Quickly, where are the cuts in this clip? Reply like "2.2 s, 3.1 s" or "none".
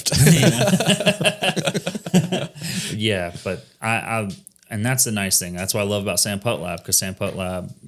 none